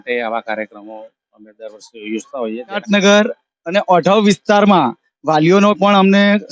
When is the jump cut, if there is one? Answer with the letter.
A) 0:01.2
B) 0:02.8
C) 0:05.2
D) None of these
B